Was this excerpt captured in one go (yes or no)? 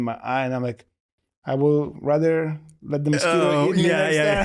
yes